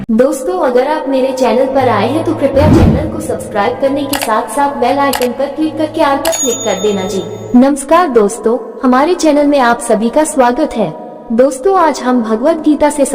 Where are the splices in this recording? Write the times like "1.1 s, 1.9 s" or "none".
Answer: 7.4 s